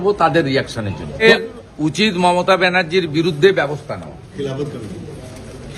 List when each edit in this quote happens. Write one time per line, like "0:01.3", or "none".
0:01.2